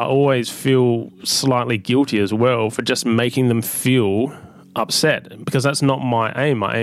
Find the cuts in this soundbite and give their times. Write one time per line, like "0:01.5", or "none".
none